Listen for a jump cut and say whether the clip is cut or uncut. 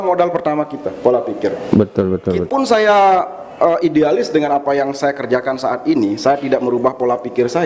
cut